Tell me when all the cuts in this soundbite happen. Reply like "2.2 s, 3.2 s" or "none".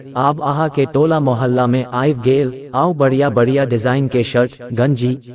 2.6 s